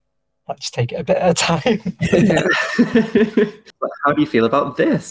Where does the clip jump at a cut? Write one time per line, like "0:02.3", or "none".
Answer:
0:03.7